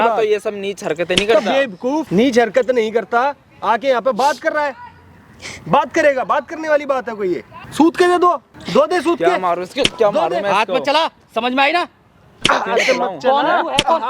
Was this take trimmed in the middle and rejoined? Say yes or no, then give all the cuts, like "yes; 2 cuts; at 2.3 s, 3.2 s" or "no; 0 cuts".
yes; 3 cuts; at 2.1 s, 7.6 s, 8.5 s